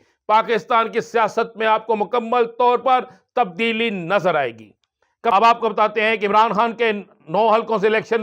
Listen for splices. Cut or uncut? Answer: cut